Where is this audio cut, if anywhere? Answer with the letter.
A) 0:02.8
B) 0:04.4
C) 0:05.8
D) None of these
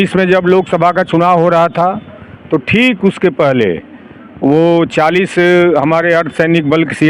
D